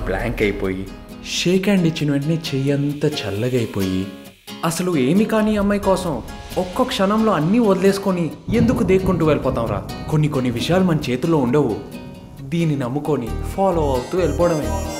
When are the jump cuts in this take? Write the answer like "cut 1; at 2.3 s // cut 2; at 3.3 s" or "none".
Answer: none